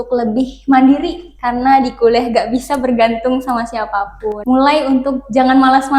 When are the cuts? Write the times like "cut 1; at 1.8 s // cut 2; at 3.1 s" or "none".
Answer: cut 1; at 4.3 s